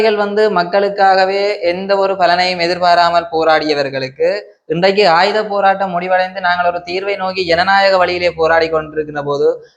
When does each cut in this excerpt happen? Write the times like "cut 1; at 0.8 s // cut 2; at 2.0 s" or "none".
none